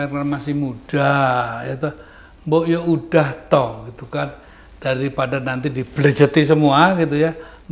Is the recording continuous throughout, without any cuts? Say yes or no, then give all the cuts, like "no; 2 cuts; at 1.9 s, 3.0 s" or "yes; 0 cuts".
yes; 0 cuts